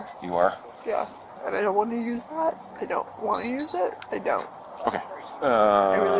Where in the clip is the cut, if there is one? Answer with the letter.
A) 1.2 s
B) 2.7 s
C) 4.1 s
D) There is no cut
A